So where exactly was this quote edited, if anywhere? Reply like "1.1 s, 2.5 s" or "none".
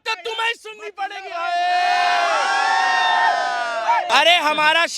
4.1 s